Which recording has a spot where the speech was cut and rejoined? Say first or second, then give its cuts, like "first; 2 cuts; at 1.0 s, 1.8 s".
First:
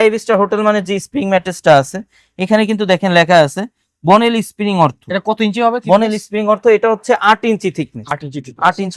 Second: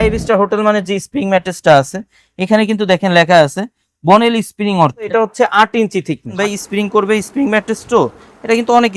second; 2 cuts; at 5.1 s, 6.4 s